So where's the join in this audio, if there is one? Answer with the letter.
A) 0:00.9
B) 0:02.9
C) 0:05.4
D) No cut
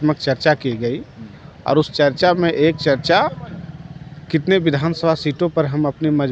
D